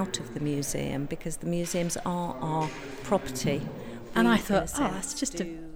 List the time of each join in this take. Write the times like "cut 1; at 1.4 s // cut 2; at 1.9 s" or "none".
cut 1; at 4.0 s